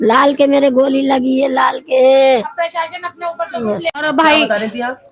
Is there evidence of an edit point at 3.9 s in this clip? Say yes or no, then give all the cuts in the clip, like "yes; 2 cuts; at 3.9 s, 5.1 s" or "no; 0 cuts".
yes; 1 cut; at 3.9 s